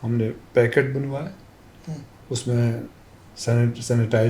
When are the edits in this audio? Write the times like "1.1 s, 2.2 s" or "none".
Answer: none